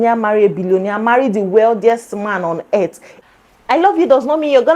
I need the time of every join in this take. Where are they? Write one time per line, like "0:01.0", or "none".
0:03.1